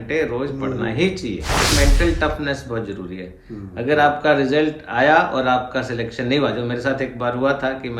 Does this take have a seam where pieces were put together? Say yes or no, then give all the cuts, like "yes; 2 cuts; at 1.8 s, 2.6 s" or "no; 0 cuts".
yes; 1 cut; at 1.7 s